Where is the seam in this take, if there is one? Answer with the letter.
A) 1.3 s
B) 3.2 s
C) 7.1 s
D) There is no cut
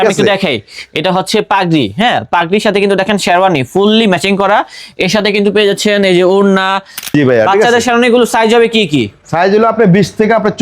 C